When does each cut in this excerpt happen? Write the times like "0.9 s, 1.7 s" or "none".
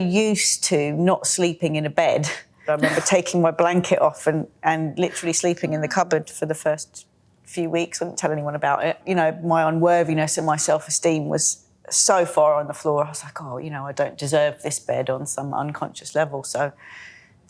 2.7 s, 9.0 s